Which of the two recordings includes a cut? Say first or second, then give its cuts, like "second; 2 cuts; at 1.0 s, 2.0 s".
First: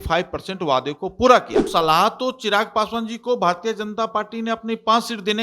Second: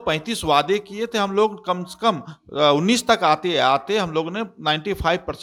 first; 1 cut; at 1.6 s